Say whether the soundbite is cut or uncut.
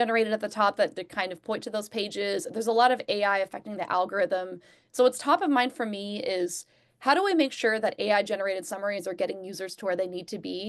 uncut